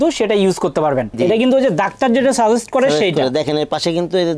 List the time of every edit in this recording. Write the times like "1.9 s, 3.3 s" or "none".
1.2 s